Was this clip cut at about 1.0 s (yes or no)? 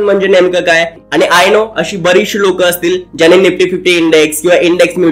yes